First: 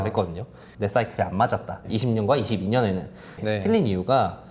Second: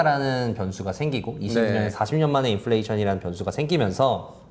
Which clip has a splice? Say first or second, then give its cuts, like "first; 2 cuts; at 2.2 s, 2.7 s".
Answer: first; 1 cut; at 3.4 s